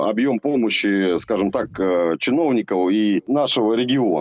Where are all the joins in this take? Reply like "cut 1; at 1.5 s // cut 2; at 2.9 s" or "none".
cut 1; at 3.3 s